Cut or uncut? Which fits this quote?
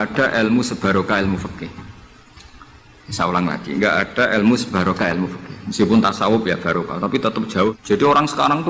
cut